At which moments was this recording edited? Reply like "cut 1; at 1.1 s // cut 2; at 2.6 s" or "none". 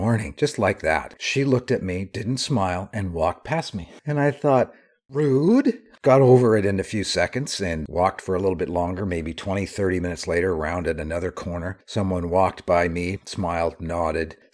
cut 1; at 1.2 s // cut 2; at 4.0 s // cut 3; at 13.1 s